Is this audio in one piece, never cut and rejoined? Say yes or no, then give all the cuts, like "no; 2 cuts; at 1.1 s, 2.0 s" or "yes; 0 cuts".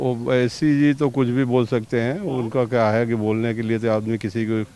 yes; 0 cuts